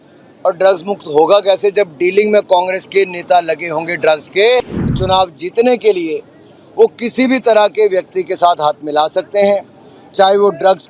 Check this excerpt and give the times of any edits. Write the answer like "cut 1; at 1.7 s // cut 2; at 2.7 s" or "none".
cut 1; at 4.9 s

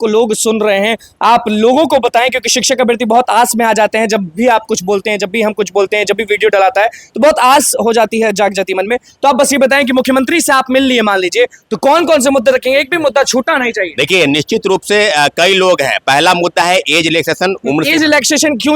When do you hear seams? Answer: none

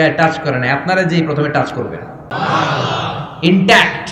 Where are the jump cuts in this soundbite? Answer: cut 1; at 2.3 s

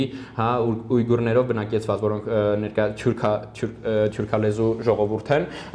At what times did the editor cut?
none

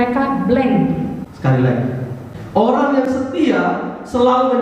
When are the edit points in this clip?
cut 1; at 1.2 s

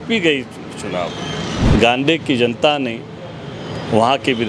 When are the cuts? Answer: cut 1; at 1.6 s

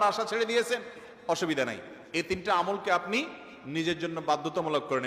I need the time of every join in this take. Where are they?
none

